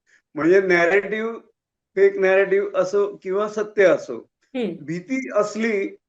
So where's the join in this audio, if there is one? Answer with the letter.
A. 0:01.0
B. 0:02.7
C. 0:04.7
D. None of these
D